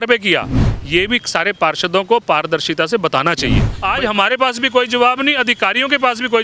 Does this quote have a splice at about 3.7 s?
yes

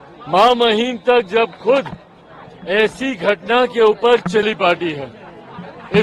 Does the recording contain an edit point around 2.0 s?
no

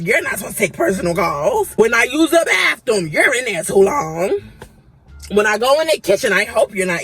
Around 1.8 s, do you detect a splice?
yes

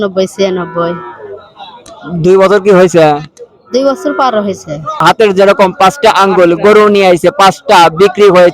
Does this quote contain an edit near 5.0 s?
yes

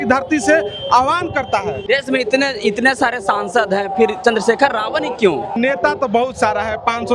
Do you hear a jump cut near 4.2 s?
no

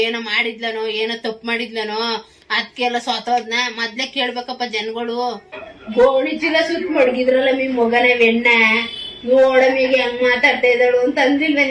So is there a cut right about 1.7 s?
no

